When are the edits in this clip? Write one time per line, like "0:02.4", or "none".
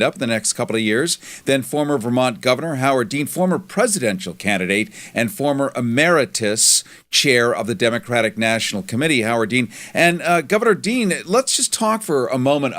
0:09.6